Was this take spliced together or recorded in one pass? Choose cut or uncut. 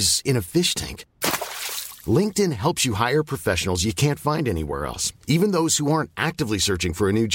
uncut